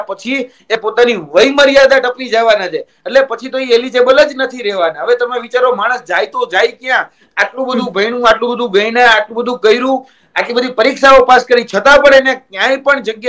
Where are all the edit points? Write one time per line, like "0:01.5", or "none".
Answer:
none